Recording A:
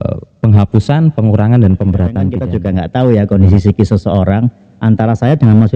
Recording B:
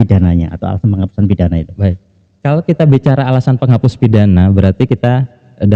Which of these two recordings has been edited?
A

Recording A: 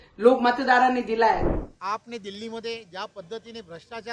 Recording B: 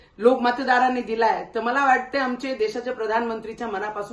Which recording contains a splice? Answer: A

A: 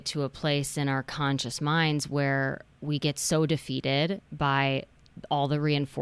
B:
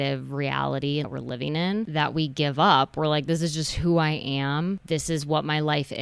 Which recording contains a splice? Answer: B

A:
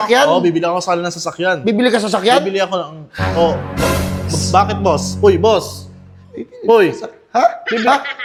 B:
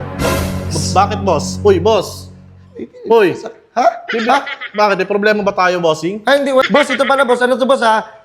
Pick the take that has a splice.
B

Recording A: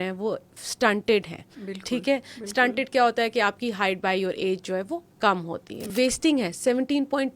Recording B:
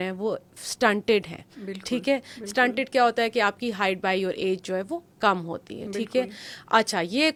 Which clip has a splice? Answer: A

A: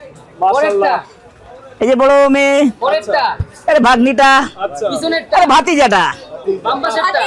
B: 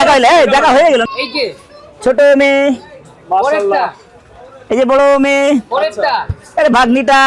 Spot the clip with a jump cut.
B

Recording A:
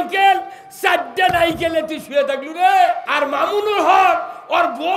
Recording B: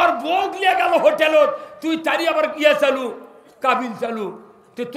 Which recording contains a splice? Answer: A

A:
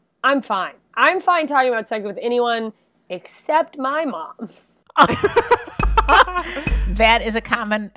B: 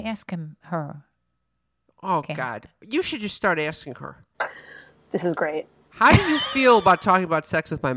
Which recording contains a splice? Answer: B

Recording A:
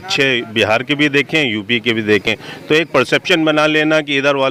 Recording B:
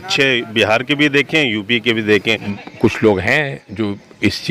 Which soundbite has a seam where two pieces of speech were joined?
B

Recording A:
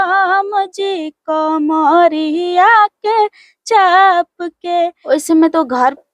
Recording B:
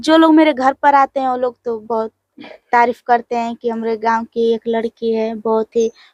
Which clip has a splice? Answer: A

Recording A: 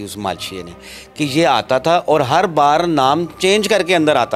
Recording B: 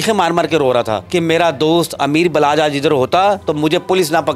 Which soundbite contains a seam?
B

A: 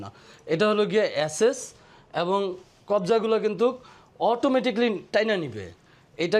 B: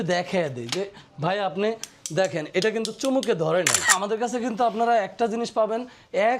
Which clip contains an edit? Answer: B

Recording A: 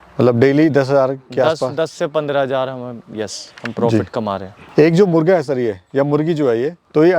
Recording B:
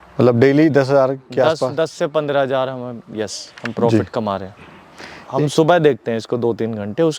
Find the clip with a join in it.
B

